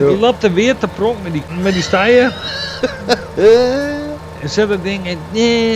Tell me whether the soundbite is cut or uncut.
cut